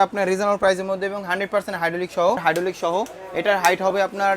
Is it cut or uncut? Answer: cut